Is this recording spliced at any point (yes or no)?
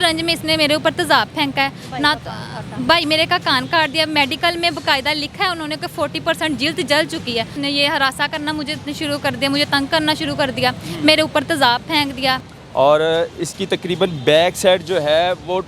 yes